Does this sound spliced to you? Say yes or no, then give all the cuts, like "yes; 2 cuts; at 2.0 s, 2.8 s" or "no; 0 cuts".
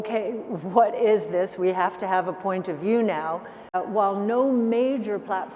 yes; 1 cut; at 3.7 s